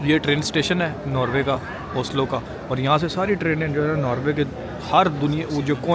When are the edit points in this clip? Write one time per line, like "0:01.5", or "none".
none